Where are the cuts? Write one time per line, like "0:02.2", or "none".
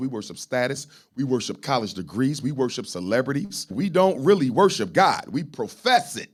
none